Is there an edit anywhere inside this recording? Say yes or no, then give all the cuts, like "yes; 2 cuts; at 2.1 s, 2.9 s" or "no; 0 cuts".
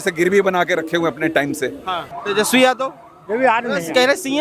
yes; 1 cut; at 2.1 s